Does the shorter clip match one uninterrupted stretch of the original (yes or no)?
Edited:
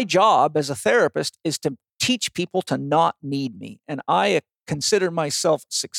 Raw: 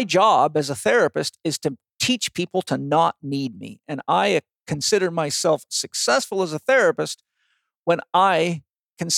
yes